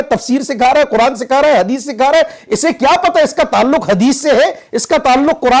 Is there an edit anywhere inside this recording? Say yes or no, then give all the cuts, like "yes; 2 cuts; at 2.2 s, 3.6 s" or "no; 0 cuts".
no; 0 cuts